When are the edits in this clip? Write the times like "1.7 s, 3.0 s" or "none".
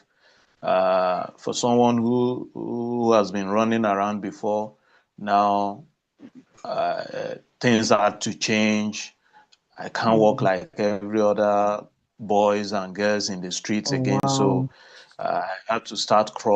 none